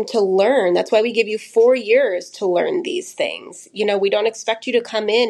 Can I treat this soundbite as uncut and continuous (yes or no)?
yes